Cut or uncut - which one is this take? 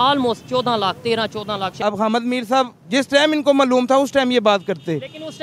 cut